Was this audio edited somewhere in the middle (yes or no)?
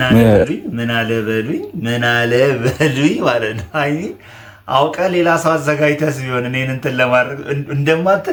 no